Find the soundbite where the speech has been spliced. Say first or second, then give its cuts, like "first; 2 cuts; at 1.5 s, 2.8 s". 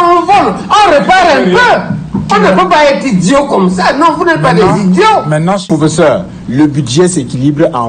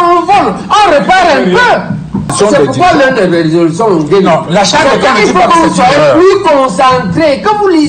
first; 2 cuts; at 2.2 s, 5.6 s